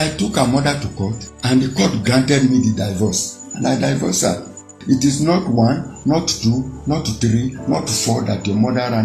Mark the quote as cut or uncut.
cut